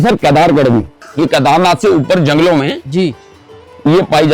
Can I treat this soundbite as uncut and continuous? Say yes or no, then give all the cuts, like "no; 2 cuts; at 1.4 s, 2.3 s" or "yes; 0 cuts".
no; 1 cut; at 1.0 s